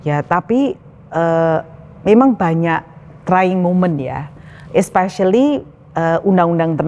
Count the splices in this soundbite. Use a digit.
0